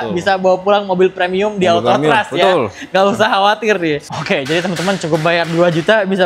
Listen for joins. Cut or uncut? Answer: cut